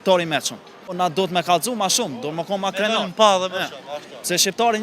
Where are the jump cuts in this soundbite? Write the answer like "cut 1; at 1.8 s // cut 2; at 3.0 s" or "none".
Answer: cut 1; at 0.9 s